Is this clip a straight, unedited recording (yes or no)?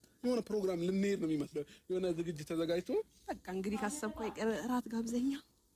yes